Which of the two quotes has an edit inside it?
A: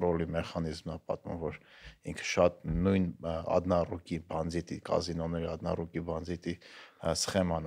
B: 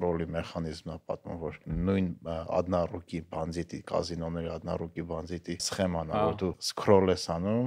B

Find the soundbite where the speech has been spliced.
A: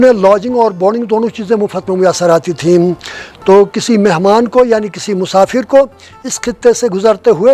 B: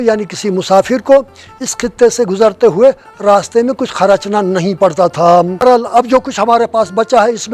B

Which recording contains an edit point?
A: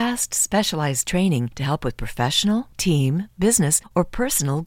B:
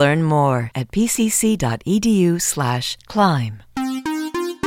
B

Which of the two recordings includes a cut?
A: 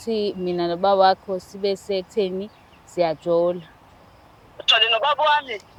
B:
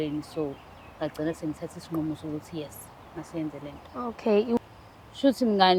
B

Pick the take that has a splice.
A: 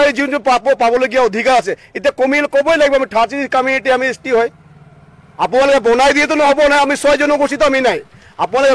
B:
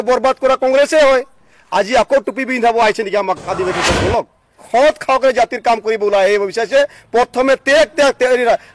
B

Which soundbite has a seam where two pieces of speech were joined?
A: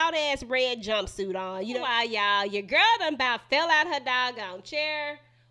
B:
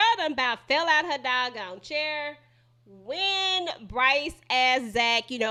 A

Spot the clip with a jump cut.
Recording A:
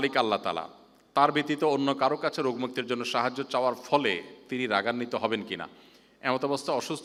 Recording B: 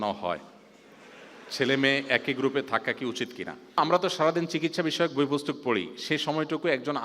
B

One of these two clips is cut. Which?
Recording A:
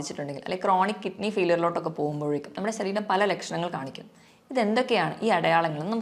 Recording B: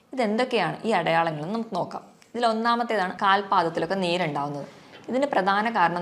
B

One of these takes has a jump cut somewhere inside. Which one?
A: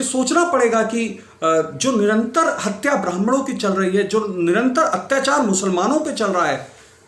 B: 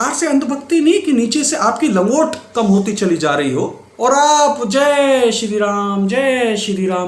B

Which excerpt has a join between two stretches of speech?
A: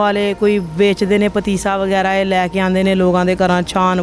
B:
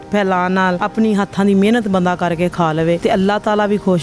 B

